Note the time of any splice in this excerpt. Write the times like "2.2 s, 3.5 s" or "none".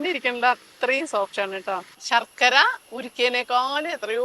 1.9 s